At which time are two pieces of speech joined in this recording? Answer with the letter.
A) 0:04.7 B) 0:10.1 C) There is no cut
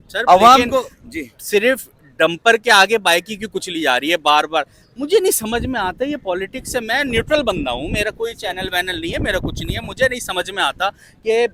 C